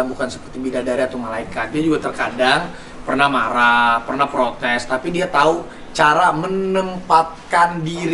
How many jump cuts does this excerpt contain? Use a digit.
0